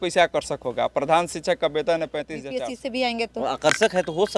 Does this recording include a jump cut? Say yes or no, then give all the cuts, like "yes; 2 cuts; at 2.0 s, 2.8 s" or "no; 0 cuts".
yes; 1 cut; at 2.6 s